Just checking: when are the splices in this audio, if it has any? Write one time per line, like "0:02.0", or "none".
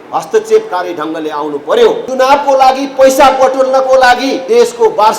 0:02.0
0:04.4